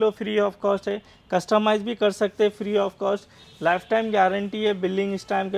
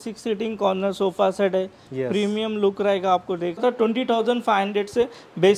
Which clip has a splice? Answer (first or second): second